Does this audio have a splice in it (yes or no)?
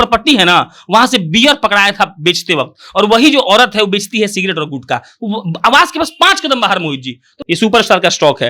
yes